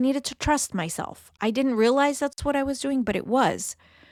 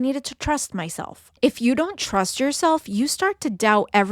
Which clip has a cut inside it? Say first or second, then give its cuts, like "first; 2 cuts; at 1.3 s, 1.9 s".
second; 1 cut; at 1.2 s